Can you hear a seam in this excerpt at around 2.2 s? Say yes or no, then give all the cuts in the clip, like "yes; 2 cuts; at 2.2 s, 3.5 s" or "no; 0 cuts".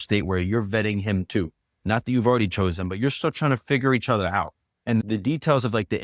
no; 1 cut; at 5.0 s